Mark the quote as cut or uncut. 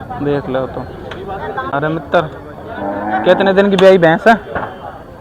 cut